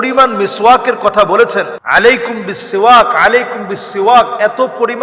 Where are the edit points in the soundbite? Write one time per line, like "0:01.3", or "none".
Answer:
0:01.8